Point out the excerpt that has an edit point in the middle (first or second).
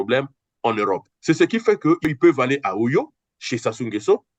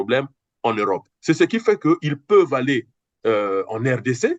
first